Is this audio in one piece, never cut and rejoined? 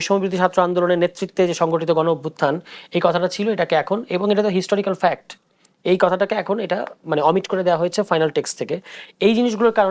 yes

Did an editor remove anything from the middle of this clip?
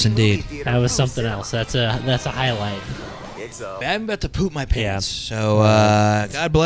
yes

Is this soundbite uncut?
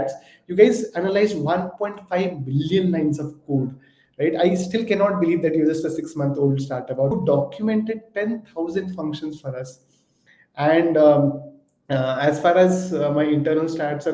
no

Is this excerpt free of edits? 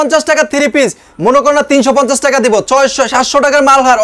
yes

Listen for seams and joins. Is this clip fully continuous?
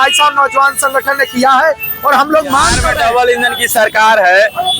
no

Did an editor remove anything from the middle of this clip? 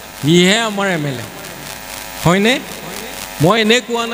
no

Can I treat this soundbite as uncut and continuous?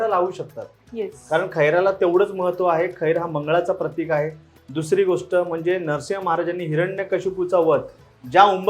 yes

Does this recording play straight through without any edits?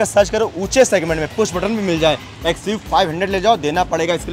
yes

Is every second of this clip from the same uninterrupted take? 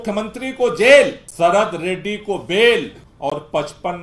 no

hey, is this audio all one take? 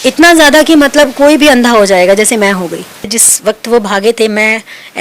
no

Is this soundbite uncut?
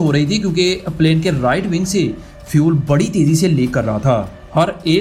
yes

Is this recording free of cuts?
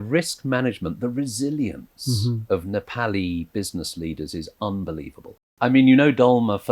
no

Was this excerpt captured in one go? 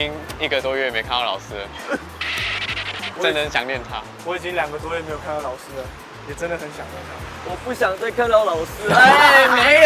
yes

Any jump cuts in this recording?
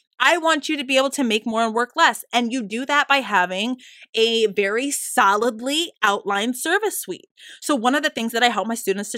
no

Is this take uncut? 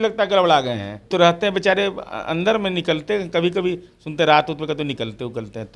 no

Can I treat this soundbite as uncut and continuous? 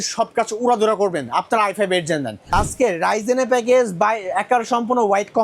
no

